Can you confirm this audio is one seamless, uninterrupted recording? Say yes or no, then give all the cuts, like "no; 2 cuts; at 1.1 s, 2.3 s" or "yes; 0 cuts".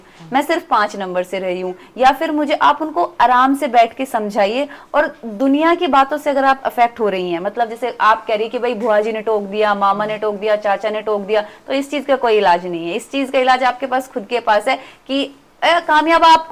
yes; 0 cuts